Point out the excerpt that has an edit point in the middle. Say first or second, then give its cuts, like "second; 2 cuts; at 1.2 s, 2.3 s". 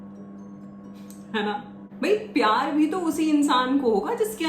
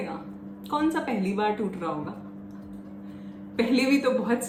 first; 1 cut; at 1.9 s